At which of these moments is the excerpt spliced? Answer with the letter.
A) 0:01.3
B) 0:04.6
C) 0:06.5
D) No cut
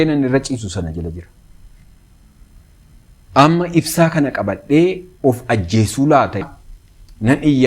C